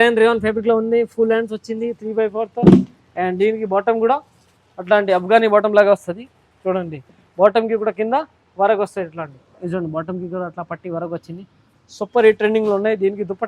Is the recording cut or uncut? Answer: uncut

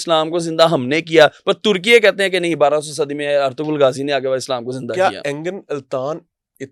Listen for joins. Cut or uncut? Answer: uncut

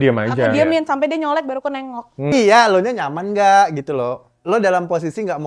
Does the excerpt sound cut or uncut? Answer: cut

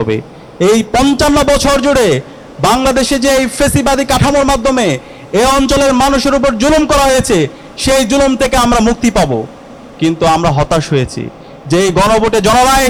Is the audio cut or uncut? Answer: uncut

